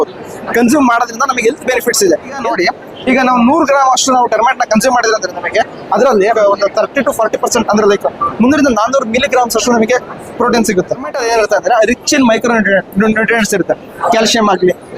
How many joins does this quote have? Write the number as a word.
three